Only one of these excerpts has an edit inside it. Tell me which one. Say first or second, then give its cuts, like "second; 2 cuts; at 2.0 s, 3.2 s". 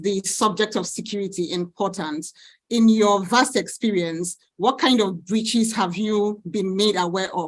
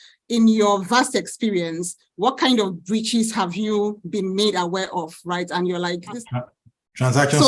second; 1 cut; at 6.2 s